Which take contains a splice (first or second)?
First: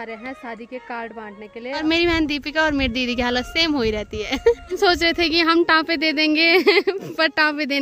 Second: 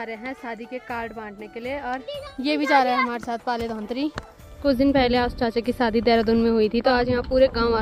first